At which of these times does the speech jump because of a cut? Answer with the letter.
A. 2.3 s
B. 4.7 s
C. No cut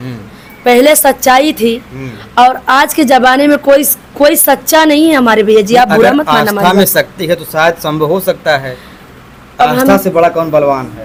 C